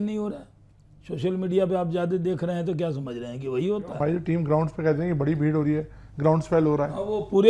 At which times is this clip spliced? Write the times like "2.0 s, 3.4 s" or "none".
none